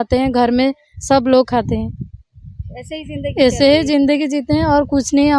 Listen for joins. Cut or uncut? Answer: uncut